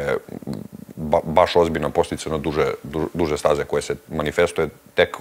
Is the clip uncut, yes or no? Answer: yes